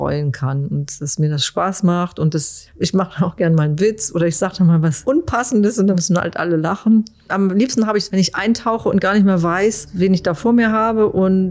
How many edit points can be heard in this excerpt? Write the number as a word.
three